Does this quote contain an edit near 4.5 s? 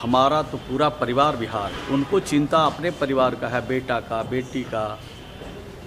no; 1 cut; at 1.7 s

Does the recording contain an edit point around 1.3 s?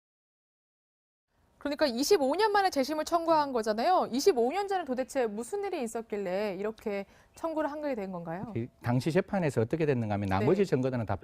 no; 1 cut; at 5.5 s

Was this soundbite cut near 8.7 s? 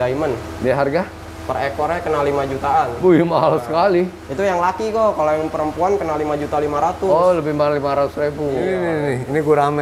yes; 1 cut; at 8.7 s

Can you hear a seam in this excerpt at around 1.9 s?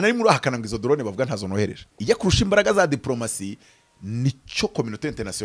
yes; 1 cut; at 1.9 s

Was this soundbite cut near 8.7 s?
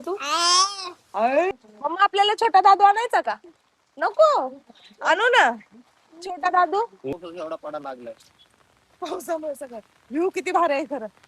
no; 2 cuts; at 1.5 s, 7.1 s

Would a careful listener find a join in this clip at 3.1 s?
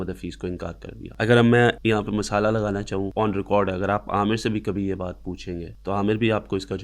yes; 4 cuts; at 1.0 s, 1.8 s, 3.1 s, 5.7 s

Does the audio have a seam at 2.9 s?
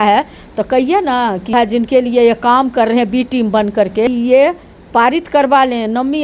no; 2 cuts; at 1.5 s, 4.1 s

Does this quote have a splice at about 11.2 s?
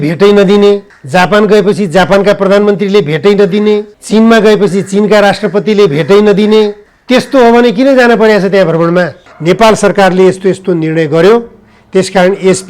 no; 4 cuts; at 0.9 s, 3.9 s, 6.9 s, 9.2 s

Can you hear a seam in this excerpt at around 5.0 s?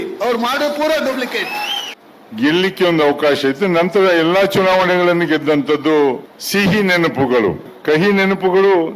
no; 3 cuts; at 1.8 s, 6.3 s, 7.7 s

